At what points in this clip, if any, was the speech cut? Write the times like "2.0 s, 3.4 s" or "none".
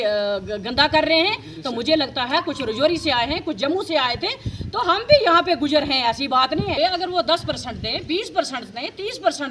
6.8 s

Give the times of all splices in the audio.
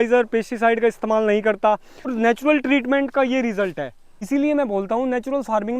2.1 s, 4.2 s

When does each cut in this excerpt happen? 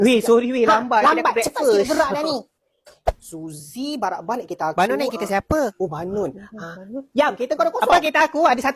none

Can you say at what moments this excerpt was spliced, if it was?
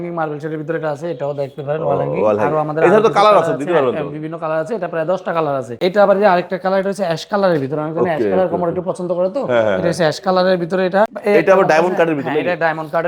5.7 s, 11.2 s

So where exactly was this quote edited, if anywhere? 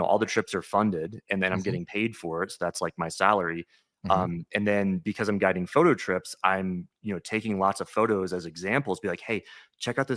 none

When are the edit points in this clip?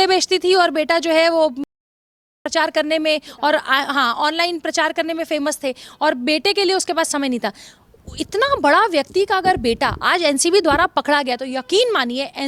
none

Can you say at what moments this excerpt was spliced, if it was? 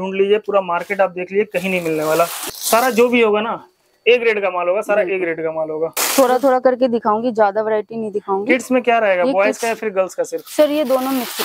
2.4 s, 6.0 s

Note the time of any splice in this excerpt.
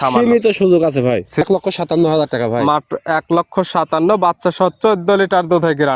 1.4 s

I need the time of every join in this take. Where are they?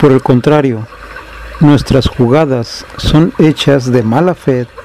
2.2 s

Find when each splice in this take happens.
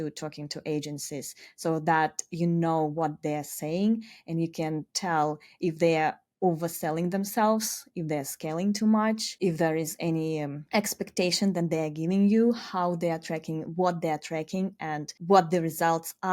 9.3 s, 10.6 s, 15.1 s

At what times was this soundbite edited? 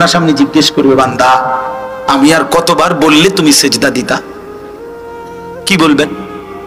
none

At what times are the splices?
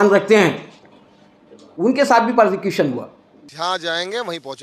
3.5 s

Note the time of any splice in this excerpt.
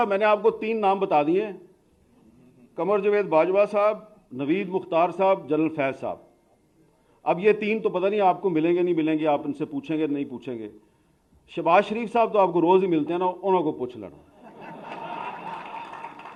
none

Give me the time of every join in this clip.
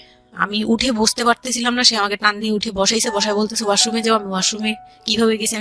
none

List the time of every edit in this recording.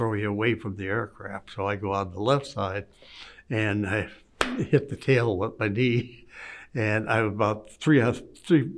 none

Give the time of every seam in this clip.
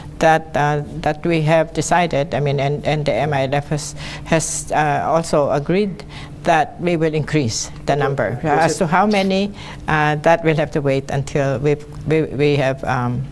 none

